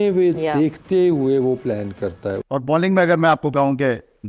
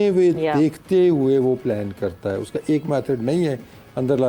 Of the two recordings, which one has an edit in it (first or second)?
first